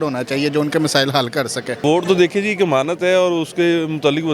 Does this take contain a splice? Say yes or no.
yes